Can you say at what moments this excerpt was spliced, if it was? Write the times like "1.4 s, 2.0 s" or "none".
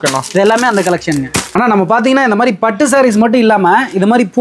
1.5 s